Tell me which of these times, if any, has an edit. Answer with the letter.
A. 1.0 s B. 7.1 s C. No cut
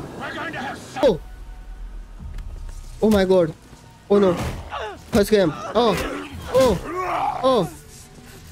A